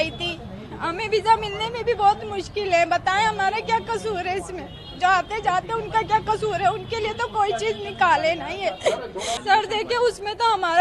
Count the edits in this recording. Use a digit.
1